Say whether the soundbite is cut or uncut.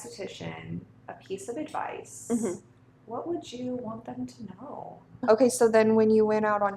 cut